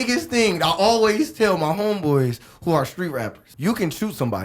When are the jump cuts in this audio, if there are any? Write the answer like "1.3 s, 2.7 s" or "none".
3.4 s